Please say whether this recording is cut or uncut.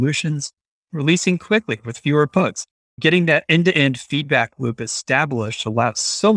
uncut